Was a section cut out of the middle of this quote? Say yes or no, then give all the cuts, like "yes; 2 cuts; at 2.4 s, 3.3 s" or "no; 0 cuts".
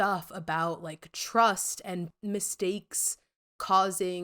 yes; 1 cut; at 2.1 s